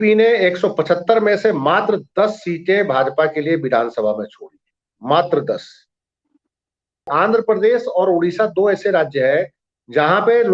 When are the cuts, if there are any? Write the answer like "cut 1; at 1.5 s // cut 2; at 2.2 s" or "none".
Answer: cut 1; at 7.1 s